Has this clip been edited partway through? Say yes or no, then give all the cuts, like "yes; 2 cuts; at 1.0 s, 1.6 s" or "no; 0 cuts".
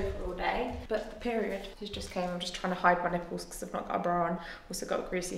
no; 0 cuts